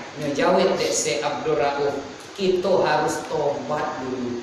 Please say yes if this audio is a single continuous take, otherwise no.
yes